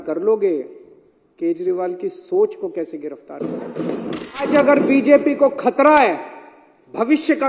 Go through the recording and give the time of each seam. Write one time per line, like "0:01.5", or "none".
0:04.4